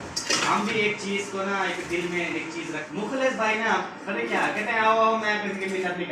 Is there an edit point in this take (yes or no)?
yes